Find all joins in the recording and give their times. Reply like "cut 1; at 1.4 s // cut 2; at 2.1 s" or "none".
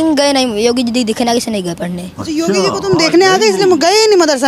none